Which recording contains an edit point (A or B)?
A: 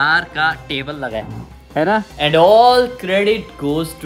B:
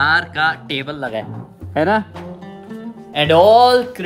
A